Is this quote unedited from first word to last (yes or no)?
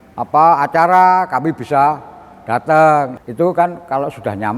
no